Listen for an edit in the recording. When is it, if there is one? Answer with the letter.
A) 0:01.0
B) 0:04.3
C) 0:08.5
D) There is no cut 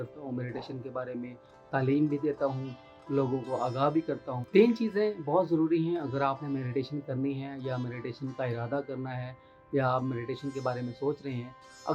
B